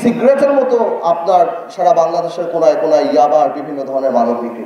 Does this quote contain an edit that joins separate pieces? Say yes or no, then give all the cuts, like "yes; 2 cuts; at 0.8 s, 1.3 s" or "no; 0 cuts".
no; 0 cuts